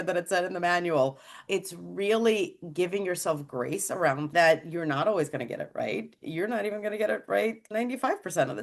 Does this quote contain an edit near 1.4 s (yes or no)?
yes